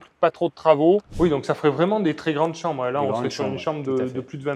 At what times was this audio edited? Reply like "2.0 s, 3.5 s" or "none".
1.1 s